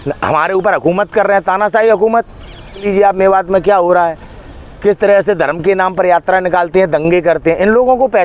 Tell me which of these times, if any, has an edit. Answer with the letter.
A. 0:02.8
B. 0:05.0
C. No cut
A